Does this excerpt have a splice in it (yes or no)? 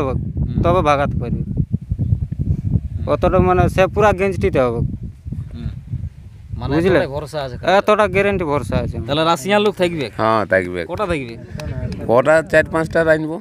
yes